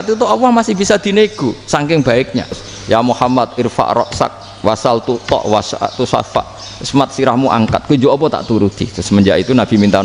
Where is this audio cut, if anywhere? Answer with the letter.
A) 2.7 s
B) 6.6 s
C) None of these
A